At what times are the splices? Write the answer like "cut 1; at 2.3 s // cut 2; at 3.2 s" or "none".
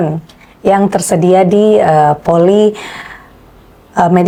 none